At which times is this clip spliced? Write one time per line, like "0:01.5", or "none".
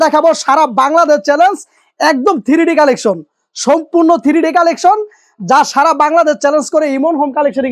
none